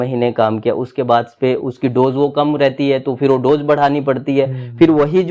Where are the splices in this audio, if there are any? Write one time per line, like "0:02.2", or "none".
none